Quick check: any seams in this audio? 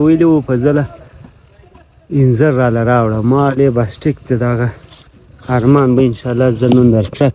no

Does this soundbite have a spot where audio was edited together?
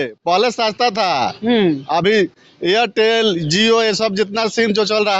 no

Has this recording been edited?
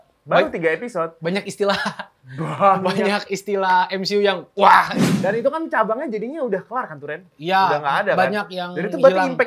yes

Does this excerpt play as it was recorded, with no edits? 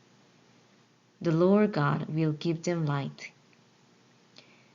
no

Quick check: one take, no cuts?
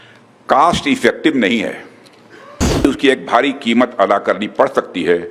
no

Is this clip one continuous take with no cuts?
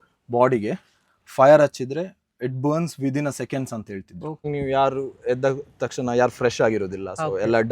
no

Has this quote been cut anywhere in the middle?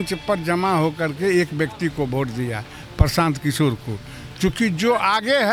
no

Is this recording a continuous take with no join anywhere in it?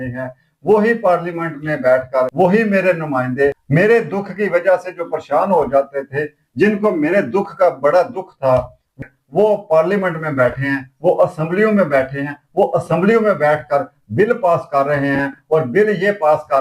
no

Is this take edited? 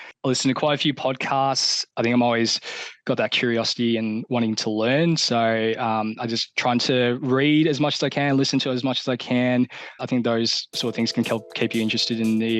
yes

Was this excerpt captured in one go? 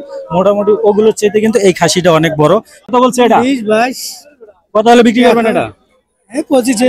no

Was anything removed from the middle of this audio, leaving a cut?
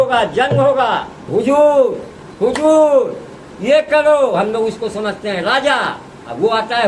yes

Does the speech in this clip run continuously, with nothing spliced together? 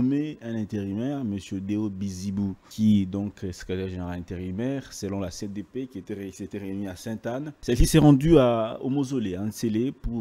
no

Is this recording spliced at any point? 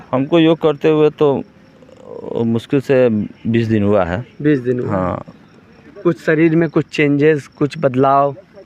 no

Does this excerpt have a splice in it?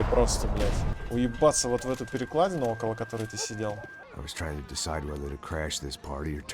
yes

